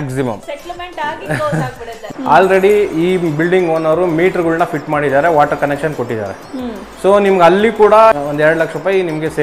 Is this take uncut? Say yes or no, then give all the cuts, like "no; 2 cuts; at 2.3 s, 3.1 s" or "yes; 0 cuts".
no; 2 cuts; at 2.0 s, 8.1 s